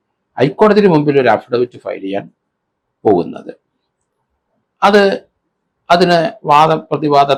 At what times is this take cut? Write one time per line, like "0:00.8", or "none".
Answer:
none